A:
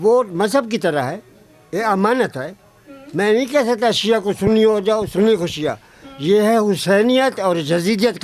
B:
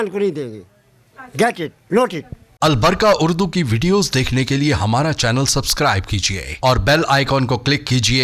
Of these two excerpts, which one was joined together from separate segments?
B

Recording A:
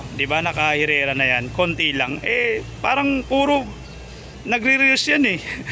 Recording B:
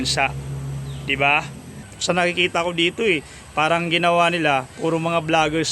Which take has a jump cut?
B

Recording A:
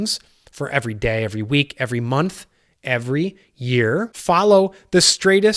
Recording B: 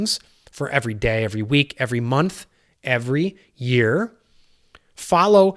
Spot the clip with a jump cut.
A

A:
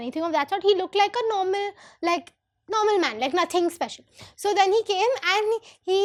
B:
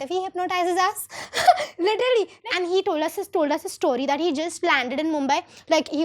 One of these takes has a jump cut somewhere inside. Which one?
B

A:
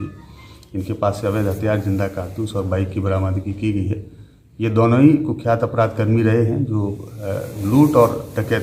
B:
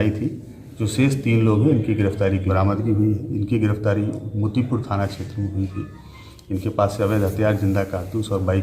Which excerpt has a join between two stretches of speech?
B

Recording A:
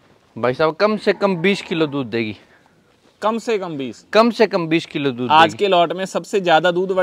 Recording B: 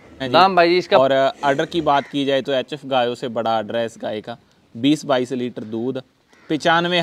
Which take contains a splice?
B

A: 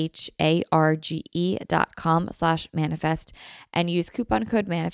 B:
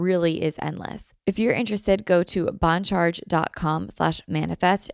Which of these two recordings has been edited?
B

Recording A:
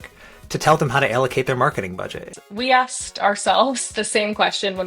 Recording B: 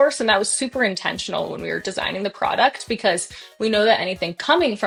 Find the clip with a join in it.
A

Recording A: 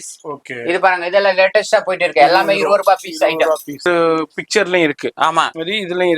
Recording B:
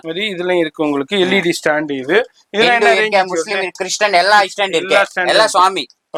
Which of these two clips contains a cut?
A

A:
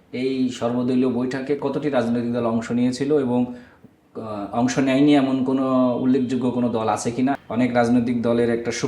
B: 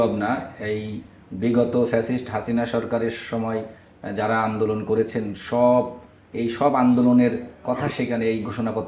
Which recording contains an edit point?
A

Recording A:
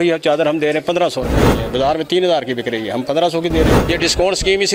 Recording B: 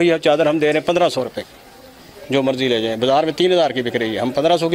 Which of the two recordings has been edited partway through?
A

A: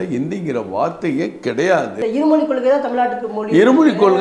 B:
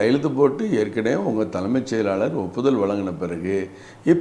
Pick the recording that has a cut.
A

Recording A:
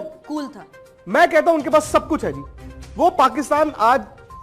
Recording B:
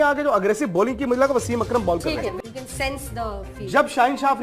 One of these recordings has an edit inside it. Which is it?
B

